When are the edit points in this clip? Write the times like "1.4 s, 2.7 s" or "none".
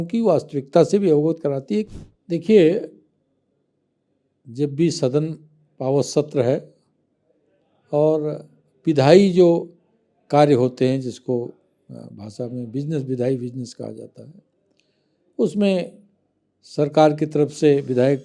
1.9 s